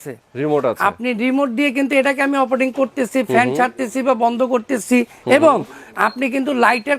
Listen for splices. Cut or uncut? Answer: uncut